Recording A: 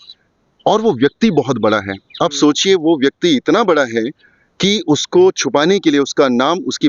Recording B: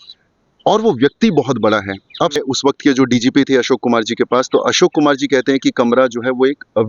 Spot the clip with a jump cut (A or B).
B